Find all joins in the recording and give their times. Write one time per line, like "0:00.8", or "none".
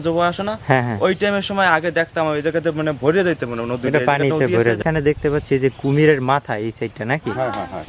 0:04.8